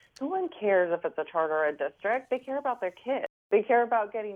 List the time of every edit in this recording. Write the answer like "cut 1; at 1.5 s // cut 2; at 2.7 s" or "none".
cut 1; at 3.4 s

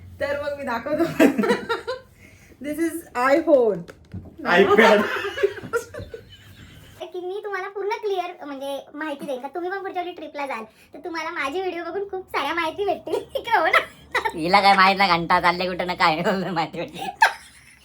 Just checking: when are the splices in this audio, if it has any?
cut 1; at 4.1 s // cut 2; at 7.0 s

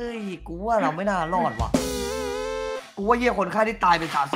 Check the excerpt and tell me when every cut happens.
none

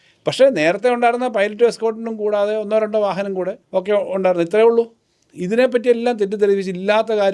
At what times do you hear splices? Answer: cut 1; at 3.6 s

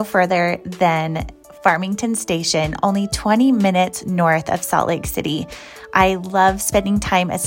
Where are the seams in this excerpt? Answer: none

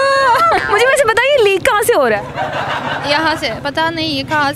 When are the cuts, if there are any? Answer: none

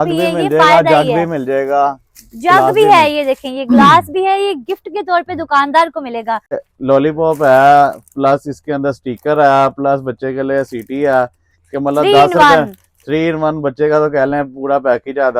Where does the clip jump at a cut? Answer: cut 1; at 6.6 s

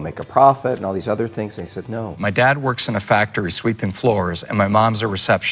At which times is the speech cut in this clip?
cut 1; at 2.1 s

